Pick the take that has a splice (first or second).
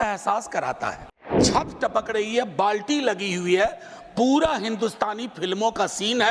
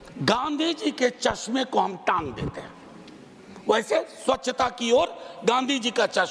first